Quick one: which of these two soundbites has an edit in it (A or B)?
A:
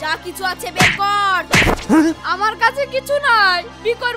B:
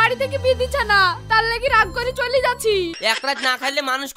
B